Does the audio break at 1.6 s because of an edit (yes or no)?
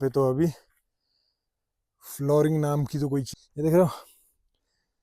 no